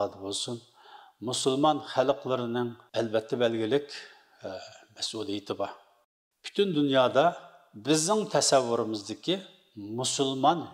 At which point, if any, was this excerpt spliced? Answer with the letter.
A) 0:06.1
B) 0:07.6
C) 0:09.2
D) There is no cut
A